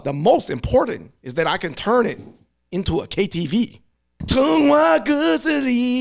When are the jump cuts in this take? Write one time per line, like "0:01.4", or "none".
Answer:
none